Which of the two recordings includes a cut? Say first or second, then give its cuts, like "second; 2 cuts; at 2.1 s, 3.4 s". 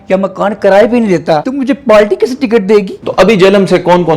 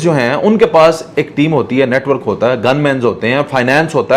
first; 2 cuts; at 1.5 s, 3.0 s